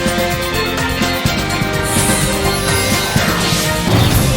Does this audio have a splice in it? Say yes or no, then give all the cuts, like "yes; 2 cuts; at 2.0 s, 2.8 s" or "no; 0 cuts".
no; 0 cuts